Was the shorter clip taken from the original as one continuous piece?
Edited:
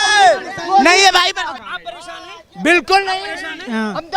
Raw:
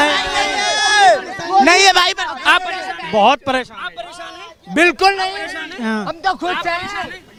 no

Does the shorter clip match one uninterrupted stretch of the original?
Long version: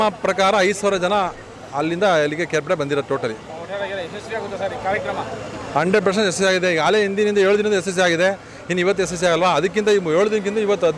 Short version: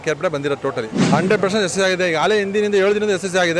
no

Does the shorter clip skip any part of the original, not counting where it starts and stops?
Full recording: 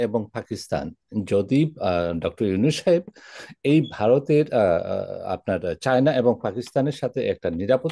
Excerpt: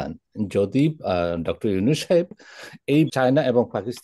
yes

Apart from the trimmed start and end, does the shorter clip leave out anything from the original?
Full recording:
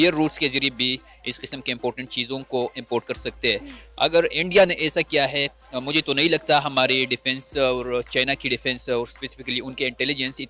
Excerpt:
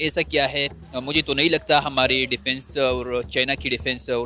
no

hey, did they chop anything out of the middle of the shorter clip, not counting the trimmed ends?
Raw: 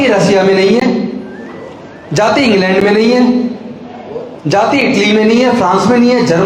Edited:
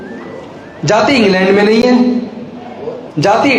no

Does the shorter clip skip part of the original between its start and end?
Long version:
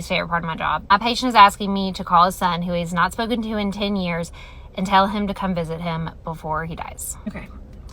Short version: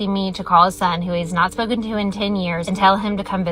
yes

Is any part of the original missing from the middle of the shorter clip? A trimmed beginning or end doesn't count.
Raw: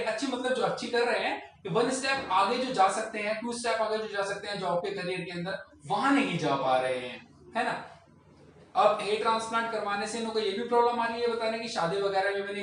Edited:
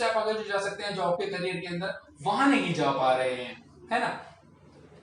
no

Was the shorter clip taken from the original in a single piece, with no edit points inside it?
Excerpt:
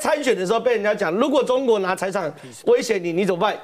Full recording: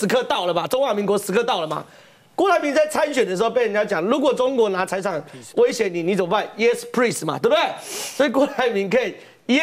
yes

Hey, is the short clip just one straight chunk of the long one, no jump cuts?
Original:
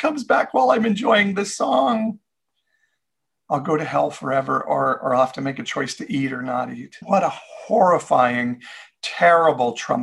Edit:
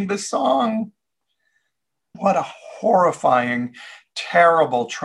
no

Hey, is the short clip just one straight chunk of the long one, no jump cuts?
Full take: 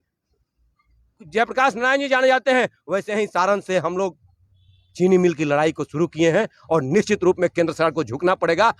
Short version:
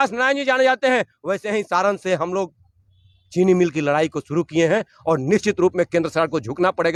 yes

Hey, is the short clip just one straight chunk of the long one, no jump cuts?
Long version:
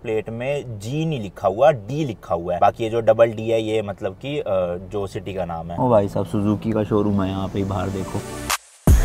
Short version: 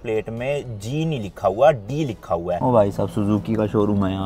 no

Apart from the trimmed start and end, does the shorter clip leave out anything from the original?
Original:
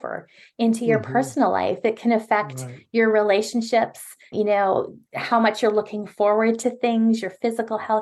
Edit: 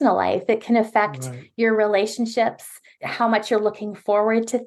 yes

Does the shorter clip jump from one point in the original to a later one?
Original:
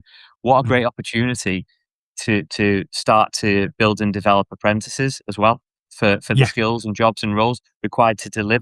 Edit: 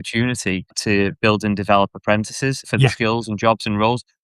yes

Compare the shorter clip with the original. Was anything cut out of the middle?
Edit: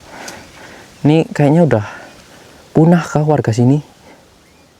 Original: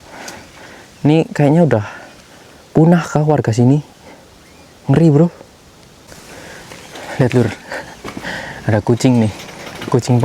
no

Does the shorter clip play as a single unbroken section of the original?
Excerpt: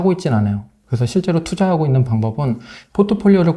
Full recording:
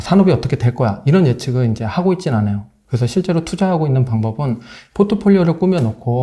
yes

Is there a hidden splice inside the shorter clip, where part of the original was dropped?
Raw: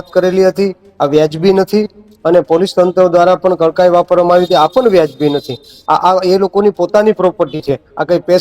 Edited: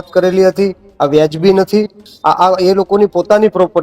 yes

